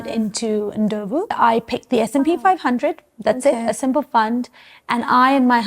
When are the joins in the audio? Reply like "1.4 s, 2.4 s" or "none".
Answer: 1.3 s